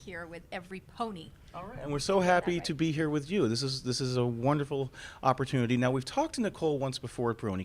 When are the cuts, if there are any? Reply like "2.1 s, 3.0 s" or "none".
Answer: 6.1 s